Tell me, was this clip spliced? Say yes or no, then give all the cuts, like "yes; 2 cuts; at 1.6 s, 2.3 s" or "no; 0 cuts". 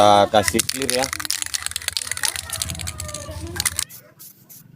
yes; 1 cut; at 3.8 s